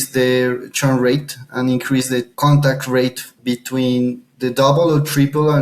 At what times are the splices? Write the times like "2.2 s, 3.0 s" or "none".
2.3 s, 3.4 s, 4.3 s